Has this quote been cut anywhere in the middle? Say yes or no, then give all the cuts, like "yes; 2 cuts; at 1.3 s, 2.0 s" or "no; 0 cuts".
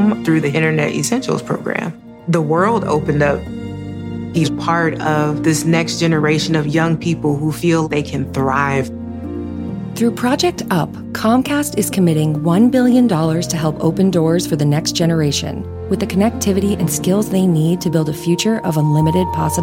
no; 0 cuts